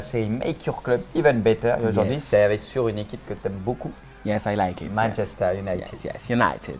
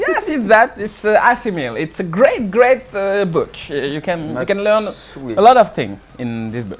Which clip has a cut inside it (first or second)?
second